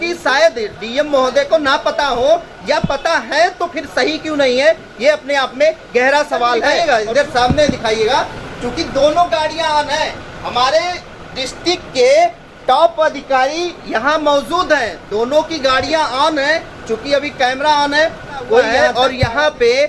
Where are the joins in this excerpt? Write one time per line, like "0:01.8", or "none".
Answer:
0:06.7
0:18.7